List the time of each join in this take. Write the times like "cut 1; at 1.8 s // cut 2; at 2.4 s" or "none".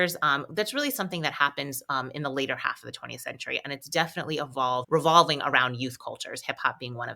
cut 1; at 4.8 s